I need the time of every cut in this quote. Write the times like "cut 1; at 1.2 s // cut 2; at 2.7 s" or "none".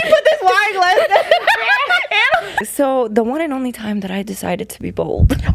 cut 1; at 2.6 s